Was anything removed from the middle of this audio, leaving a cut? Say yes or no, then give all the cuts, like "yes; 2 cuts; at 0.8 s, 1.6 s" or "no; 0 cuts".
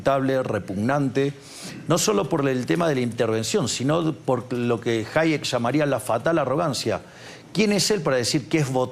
no; 0 cuts